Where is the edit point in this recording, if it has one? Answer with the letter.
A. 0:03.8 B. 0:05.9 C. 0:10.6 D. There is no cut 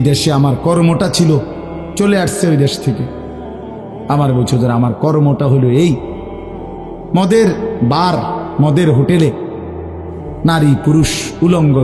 D